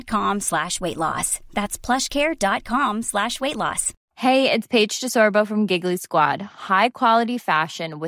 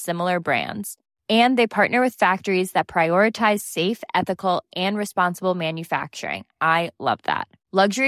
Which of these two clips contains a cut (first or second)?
first